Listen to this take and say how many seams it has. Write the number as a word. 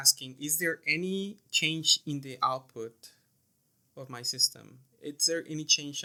zero